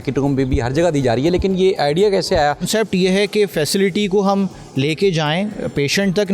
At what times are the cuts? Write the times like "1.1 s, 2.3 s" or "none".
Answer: 2.7 s